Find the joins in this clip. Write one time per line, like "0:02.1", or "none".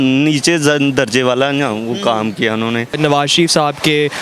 0:03.0